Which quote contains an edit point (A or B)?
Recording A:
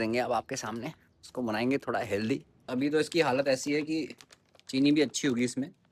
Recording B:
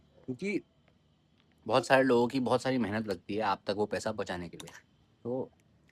A